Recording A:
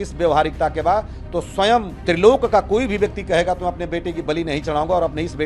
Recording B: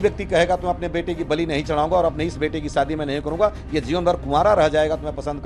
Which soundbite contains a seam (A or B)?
A